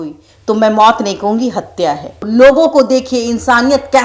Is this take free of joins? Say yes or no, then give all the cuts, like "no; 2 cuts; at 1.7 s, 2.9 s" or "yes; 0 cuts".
no; 1 cut; at 2.2 s